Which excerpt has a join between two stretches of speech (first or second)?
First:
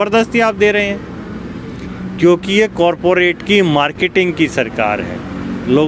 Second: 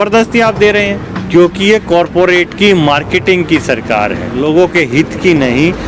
second